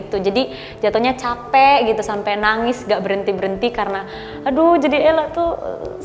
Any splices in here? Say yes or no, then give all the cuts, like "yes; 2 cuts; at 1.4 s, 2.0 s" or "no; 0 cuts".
no; 0 cuts